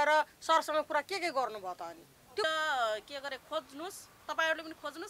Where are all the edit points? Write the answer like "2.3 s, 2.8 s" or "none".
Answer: 2.4 s